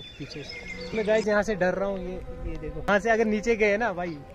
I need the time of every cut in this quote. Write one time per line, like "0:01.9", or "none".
0:00.9
0:02.9